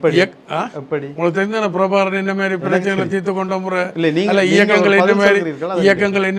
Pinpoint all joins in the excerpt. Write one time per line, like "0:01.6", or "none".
none

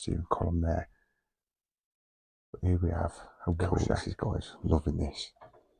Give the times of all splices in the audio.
0:03.7

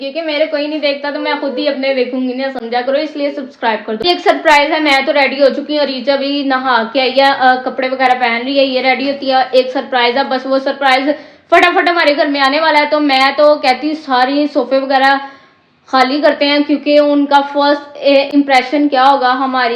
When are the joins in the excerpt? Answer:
none

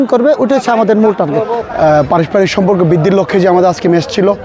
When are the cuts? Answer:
0:01.6

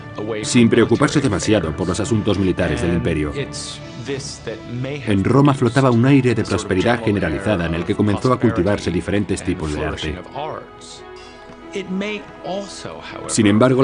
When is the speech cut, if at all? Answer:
0:09.2

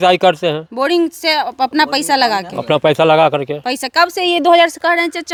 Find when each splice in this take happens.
none

